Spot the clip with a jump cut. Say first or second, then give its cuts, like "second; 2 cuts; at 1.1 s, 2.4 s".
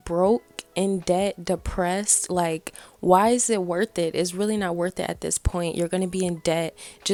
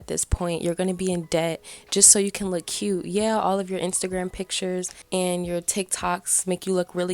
second; 1 cut; at 5.0 s